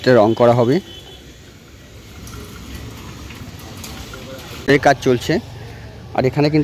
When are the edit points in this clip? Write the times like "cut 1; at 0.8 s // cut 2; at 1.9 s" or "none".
cut 1; at 4.7 s